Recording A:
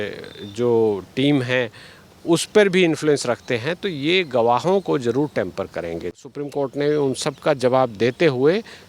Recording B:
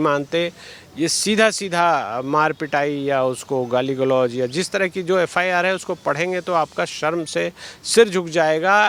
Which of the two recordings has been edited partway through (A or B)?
A